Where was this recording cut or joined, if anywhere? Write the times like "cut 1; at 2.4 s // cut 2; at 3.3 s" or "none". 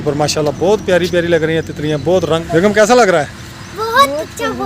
cut 1; at 2.4 s